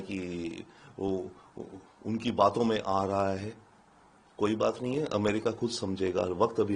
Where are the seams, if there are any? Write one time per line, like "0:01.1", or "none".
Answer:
none